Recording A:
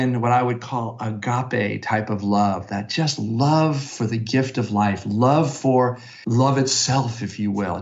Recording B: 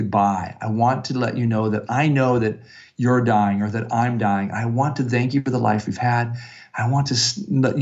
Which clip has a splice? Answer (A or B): A